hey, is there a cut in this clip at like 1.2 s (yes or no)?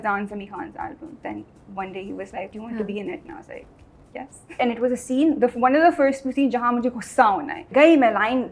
yes